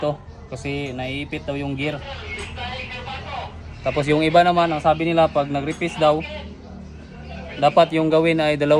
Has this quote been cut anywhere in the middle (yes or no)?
no